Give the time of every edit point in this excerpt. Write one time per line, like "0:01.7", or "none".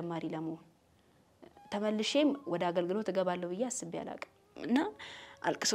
0:04.5